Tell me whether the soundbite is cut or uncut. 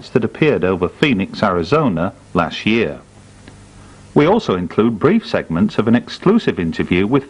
cut